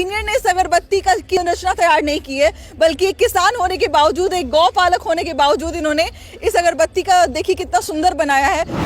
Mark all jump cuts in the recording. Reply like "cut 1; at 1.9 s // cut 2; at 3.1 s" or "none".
cut 1; at 1.4 s